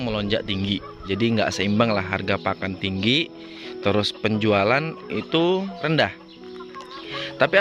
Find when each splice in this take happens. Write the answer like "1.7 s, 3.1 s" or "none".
1.0 s, 5.8 s